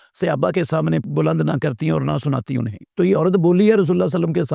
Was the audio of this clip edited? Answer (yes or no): yes